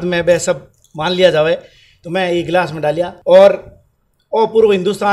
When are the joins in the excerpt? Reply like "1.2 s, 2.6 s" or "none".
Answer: 3.1 s

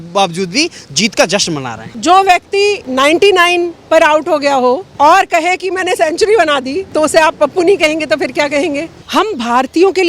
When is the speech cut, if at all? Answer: 1.9 s, 2.8 s, 4.9 s, 6.8 s, 9.0 s

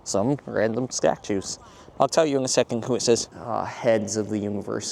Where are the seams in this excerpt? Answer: 3.4 s

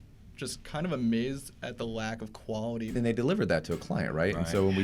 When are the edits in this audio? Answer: 2.9 s

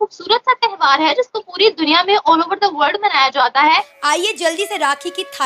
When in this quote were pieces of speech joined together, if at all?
3.9 s

